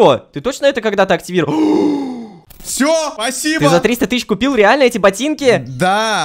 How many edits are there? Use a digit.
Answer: 2